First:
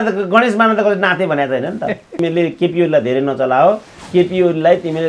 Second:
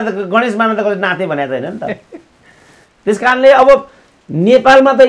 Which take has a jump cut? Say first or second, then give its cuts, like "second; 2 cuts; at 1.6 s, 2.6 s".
first; 1 cut; at 2.1 s